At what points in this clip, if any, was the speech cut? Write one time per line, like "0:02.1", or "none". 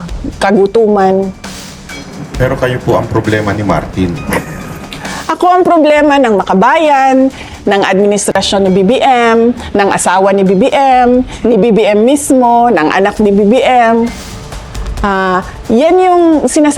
none